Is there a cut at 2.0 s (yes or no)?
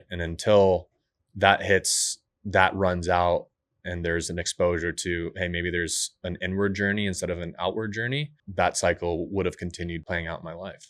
no